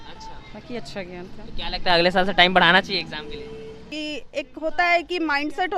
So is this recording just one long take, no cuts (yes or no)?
no